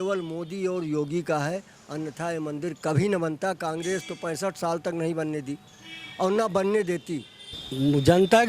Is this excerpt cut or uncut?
cut